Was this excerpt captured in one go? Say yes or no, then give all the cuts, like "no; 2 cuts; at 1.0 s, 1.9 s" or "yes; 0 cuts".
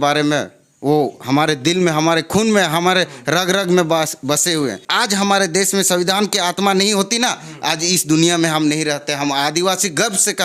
no; 1 cut; at 4.8 s